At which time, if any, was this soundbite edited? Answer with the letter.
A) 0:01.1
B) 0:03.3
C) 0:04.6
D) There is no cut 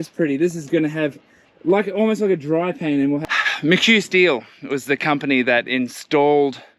B